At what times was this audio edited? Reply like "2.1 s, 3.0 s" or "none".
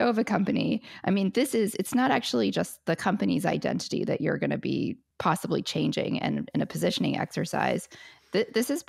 5.0 s

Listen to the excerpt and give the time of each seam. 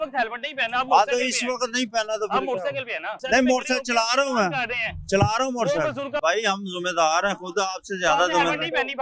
3.2 s, 6.2 s

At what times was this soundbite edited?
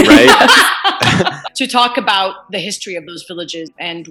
1.4 s

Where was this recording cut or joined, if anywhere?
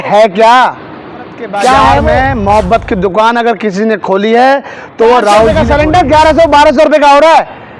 2.2 s, 5.5 s

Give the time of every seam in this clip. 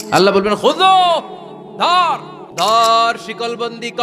2.7 s

